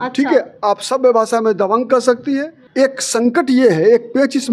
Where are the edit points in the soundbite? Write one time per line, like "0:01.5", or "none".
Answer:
0:02.6